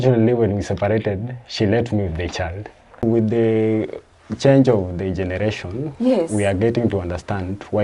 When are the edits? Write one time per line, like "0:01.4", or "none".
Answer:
0:03.0